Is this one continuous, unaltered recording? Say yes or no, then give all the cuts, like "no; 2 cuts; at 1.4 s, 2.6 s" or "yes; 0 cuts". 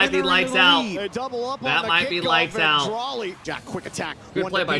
no; 1 cut; at 3.5 s